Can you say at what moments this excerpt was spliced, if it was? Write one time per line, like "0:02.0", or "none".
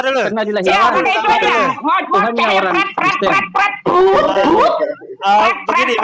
none

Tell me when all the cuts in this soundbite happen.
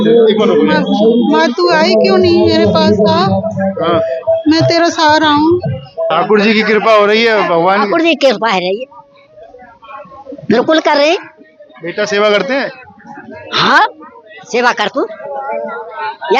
0:06.1

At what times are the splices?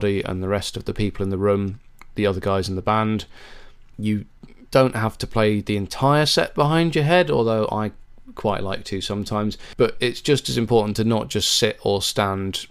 0:09.6

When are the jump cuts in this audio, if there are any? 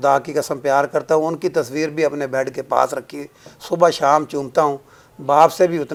none

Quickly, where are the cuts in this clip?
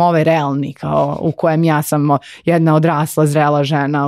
none

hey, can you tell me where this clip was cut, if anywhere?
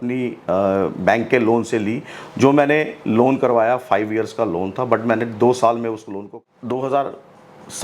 0:06.2

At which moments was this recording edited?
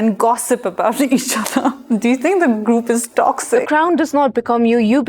0:03.6

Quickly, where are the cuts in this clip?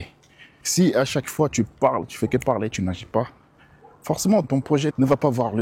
0:04.4

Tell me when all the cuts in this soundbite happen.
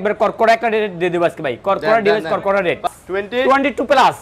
0:02.9

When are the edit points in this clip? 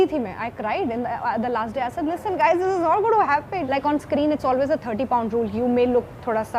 0:03.6

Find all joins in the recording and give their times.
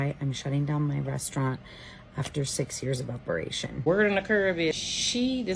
0:03.7

